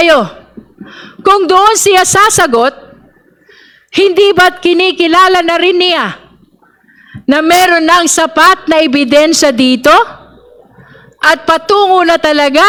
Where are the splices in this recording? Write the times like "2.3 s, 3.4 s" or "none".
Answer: none